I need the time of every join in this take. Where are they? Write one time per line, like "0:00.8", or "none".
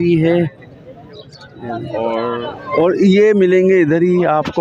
0:02.5